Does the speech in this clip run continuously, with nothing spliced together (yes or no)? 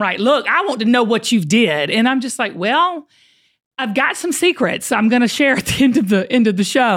yes